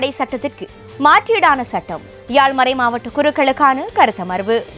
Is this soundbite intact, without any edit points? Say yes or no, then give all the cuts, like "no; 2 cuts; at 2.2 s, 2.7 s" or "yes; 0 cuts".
yes; 0 cuts